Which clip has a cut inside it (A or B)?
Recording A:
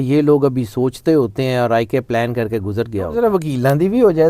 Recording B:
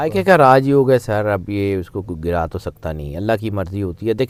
A